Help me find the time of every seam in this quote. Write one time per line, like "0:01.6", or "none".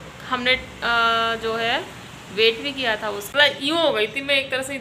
0:03.2